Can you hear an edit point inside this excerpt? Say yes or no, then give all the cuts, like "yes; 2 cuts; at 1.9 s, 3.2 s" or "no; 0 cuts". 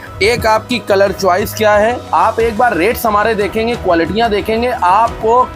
yes; 1 cut; at 2.0 s